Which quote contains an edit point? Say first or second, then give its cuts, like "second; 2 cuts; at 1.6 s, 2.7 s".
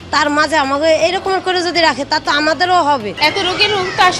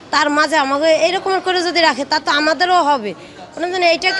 first; 1 cut; at 3.1 s